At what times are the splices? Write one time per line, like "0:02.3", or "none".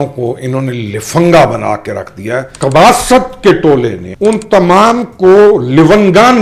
0:02.5
0:04.0